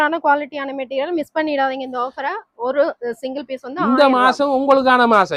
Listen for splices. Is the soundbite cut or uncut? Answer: uncut